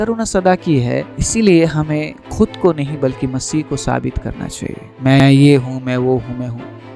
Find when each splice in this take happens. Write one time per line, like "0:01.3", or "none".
0:01.2
0:05.2